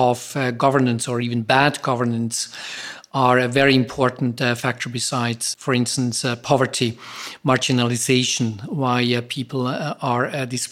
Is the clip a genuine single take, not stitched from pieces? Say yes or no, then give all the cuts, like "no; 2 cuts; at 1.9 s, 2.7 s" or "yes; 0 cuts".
no; 1 cut; at 5.4 s